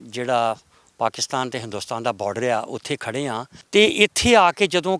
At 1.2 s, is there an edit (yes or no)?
no